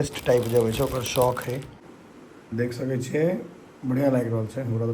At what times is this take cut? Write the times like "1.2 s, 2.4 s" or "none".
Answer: 1.8 s